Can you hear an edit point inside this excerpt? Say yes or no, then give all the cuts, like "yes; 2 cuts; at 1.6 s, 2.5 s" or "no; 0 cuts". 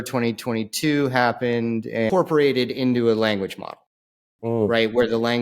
yes; 1 cut; at 2.1 s